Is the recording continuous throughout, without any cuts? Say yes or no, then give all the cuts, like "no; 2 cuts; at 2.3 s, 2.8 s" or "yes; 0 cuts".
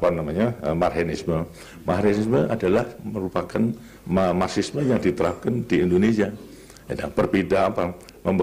yes; 0 cuts